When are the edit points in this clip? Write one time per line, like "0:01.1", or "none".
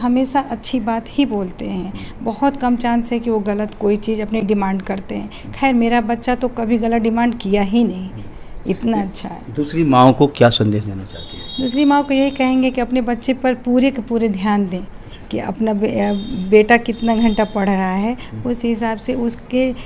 none